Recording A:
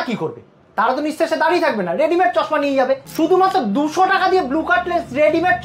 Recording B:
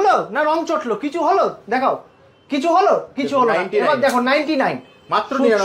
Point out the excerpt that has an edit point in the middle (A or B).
A